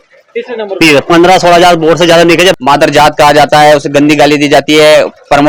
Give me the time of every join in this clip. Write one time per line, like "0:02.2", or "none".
0:02.6